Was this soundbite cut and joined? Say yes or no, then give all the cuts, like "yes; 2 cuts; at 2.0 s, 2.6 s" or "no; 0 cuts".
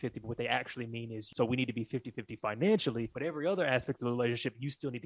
yes; 2 cuts; at 1.2 s, 3.1 s